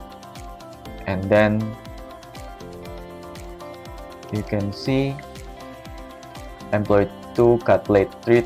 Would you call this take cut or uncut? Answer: cut